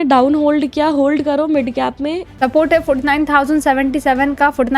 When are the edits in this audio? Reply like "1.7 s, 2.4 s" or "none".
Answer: 2.4 s